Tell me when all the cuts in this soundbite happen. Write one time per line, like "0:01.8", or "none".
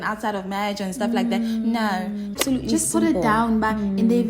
0:02.4